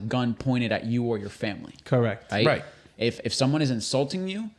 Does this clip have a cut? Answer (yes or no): no